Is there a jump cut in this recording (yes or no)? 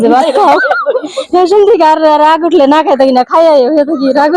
no